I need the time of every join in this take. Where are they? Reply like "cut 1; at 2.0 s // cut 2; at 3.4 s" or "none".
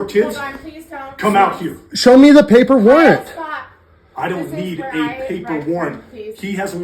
none